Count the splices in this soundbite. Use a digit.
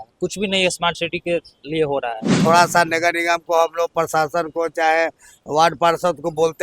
1